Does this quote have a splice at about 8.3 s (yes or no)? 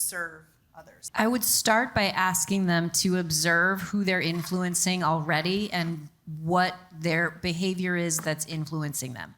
no